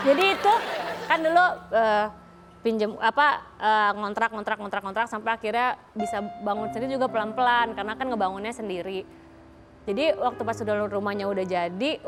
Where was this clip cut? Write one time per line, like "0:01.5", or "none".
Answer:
none